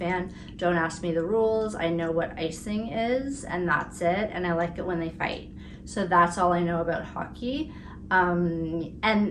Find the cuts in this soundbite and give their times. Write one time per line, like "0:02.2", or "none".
none